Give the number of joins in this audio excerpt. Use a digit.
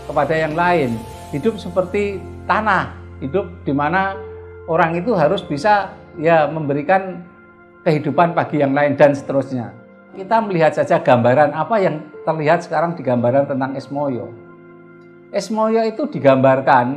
1